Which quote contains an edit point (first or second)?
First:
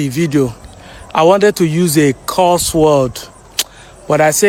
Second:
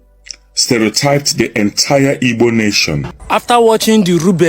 second